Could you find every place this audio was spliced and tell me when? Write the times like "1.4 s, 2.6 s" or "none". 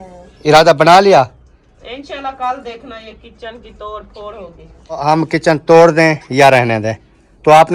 5.0 s